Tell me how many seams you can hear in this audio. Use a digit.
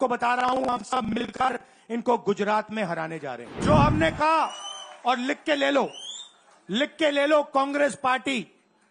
1